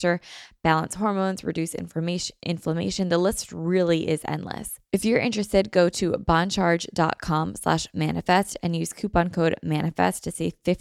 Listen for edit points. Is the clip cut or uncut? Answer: cut